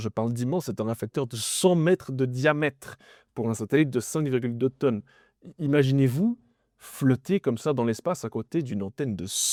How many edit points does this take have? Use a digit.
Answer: 0